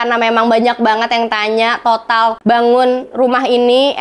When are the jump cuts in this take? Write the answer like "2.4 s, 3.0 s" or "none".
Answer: 2.4 s